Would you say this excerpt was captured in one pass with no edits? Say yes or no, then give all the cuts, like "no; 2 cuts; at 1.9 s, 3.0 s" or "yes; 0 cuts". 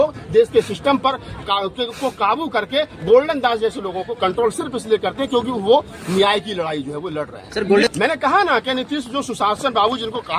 no; 1 cut; at 7.9 s